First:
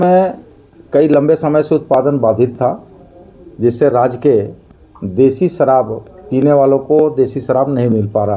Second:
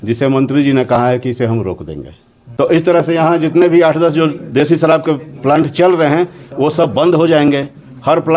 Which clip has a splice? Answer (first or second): second